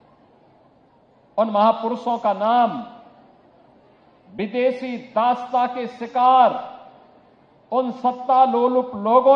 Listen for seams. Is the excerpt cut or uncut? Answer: uncut